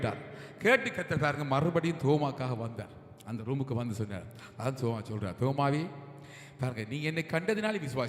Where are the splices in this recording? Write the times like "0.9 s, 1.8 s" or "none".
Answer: none